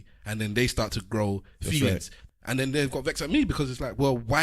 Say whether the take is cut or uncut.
cut